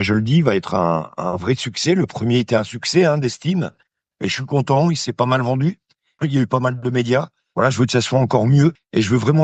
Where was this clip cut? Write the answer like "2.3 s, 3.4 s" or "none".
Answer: 7.5 s